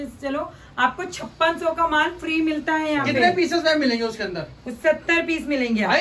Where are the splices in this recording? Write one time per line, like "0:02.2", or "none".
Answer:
none